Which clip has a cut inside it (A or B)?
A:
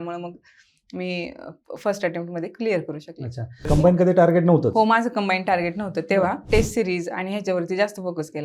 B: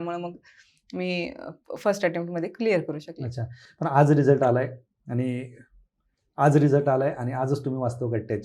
A